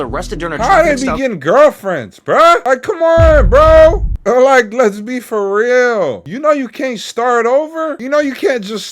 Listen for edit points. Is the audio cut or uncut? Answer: cut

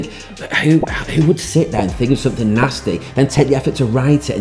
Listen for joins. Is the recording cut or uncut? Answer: uncut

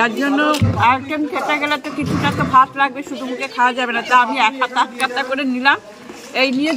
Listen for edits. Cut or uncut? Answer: uncut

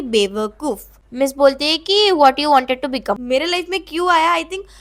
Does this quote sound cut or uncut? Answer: cut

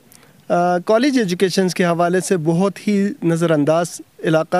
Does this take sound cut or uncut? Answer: uncut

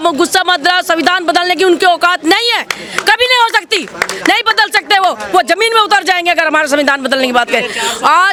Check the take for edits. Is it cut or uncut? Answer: uncut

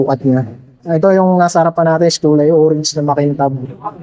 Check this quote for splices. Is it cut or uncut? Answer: uncut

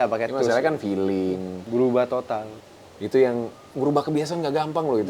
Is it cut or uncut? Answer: cut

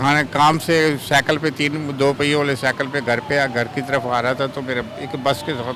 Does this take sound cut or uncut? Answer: uncut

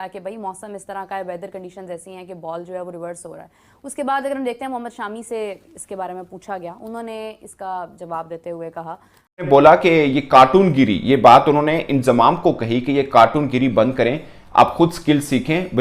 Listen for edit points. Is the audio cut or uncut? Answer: cut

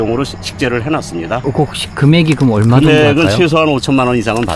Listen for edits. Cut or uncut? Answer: uncut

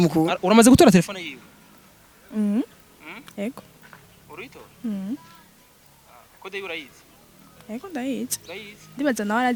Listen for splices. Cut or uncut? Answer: uncut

